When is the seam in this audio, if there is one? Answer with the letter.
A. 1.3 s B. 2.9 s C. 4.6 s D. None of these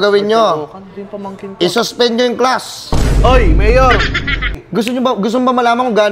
C